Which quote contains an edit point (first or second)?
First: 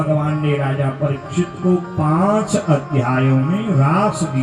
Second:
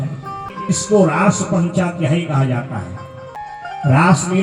second